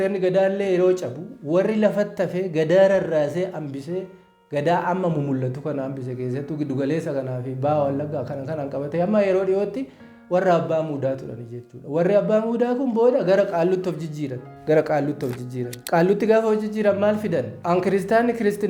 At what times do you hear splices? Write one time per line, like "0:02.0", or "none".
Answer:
0:14.5
0:15.8
0:17.5